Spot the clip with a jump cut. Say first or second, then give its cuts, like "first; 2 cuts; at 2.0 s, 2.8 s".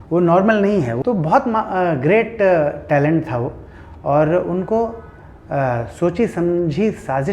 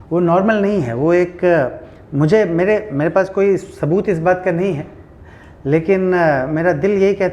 first; 1 cut; at 0.9 s